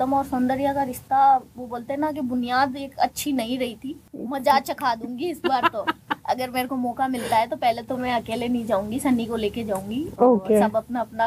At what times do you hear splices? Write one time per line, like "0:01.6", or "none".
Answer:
0:04.0